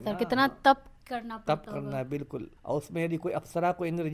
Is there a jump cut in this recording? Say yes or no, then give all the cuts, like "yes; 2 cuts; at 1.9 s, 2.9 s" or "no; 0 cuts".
yes; 1 cut; at 2.5 s